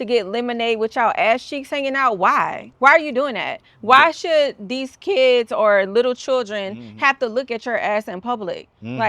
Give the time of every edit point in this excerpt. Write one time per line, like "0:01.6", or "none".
0:02.6

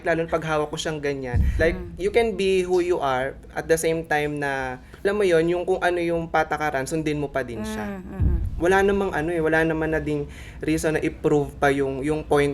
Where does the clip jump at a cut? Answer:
0:01.5
0:05.0
0:08.4

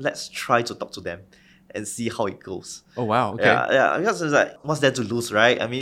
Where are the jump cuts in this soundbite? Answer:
none

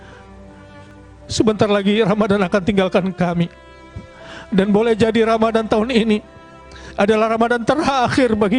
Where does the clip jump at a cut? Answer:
0:00.9

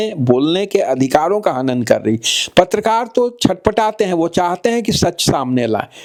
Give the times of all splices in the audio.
none

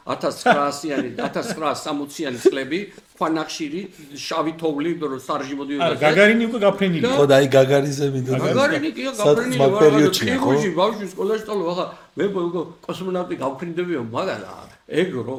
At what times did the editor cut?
none

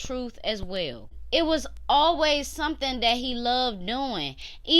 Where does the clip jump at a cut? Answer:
0:01.1

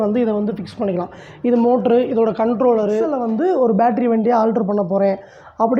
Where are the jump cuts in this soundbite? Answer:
0:03.2

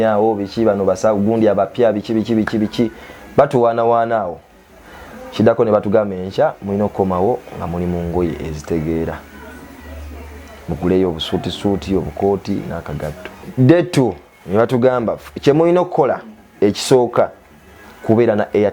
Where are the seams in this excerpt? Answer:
0:13.5

